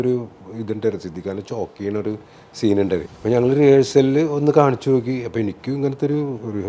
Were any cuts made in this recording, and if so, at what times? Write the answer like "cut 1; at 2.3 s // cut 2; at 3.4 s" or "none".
cut 1; at 3.0 s